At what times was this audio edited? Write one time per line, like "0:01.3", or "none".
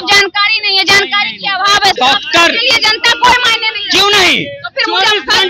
0:02.0